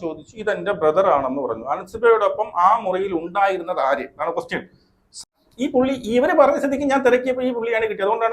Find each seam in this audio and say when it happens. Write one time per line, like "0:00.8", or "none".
0:05.2